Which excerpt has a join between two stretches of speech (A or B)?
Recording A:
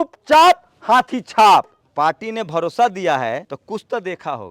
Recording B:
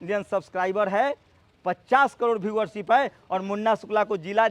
A